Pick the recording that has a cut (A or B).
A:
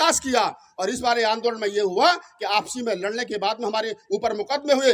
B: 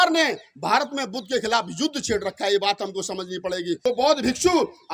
B